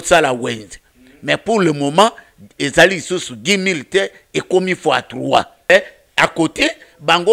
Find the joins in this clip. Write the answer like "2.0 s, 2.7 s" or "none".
5.7 s